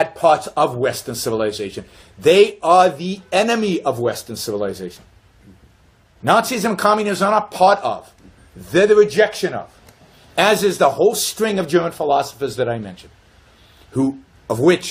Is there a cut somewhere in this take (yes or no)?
yes